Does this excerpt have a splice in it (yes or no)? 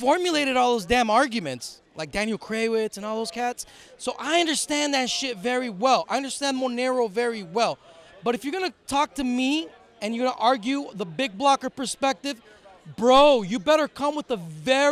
no